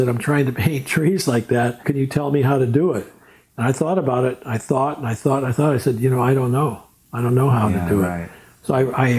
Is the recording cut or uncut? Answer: cut